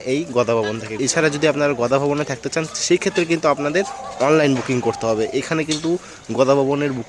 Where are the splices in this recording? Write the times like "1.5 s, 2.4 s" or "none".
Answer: 1.0 s